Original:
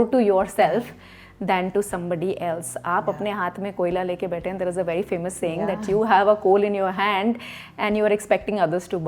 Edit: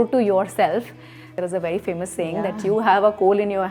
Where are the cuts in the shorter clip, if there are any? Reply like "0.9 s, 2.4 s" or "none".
1.3 s